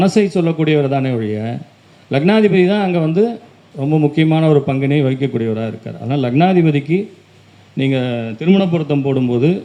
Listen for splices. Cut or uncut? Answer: uncut